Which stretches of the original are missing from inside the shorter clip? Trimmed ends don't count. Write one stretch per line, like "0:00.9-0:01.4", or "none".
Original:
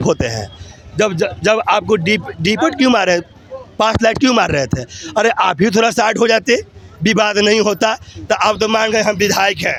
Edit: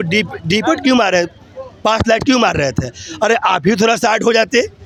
none